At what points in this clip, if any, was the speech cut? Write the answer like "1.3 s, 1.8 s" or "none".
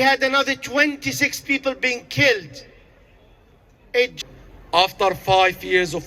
4.1 s